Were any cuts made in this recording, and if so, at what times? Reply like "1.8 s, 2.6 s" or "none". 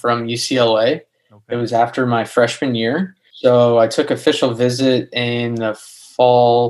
3.2 s